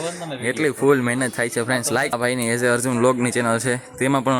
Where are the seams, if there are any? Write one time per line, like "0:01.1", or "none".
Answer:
0:02.1